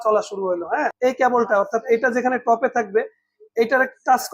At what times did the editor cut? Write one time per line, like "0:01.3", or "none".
0:00.9